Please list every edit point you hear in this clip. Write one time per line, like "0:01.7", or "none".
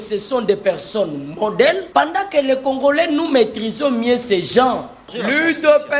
0:01.8
0:05.0